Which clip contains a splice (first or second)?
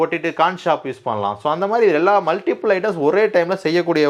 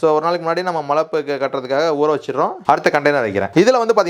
second